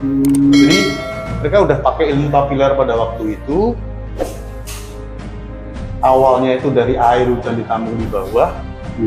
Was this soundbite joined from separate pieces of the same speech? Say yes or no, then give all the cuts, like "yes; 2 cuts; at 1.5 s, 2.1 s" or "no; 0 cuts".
no; 0 cuts